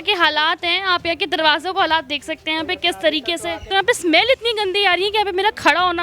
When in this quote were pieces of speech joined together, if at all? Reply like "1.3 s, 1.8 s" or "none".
3.6 s